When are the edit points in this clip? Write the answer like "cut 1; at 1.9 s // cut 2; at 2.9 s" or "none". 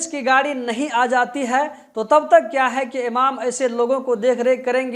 none